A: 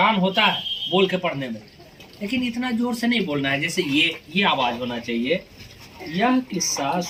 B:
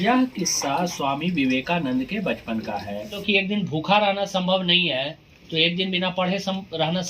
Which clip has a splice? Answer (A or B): B